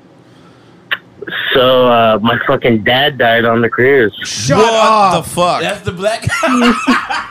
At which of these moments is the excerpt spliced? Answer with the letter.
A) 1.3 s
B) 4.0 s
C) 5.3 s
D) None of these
D